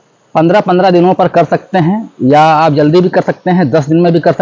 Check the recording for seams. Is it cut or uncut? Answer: uncut